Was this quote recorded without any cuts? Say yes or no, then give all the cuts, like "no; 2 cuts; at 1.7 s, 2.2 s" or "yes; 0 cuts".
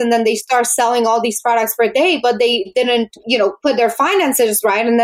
no; 1 cut; at 2.7 s